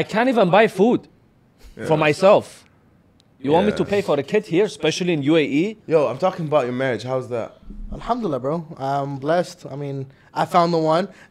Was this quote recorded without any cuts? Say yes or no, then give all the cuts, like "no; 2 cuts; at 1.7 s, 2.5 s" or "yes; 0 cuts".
no; 1 cut; at 5.8 s